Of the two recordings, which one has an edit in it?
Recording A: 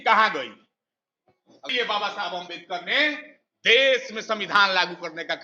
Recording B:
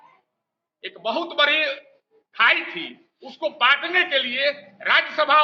A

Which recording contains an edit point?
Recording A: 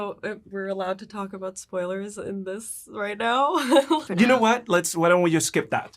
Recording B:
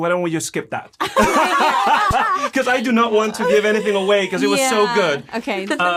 A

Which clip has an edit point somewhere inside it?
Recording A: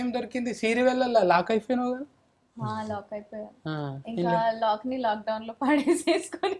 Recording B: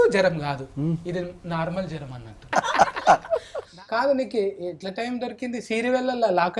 B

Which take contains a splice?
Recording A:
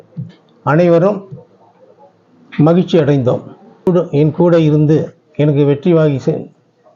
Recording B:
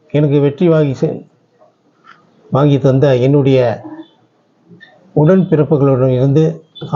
A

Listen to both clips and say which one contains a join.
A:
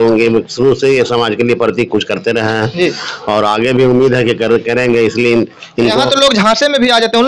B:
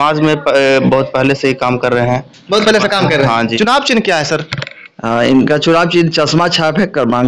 B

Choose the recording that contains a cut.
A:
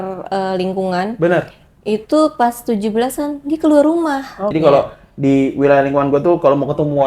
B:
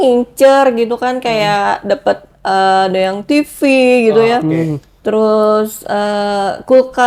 A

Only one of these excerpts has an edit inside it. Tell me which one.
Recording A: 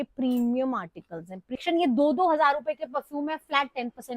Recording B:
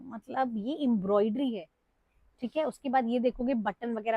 A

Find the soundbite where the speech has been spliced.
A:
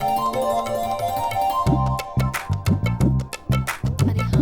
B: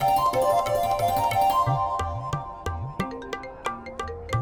A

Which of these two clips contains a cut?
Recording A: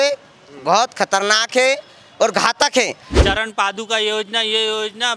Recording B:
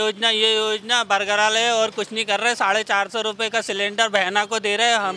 A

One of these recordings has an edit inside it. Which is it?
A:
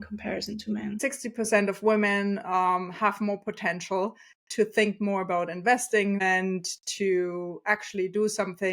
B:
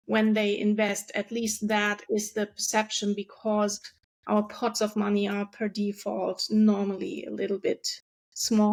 A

